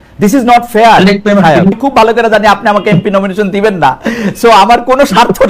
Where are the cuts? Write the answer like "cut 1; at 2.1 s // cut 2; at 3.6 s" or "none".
cut 1; at 1.8 s